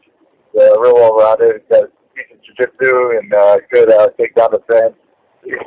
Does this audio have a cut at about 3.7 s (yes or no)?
no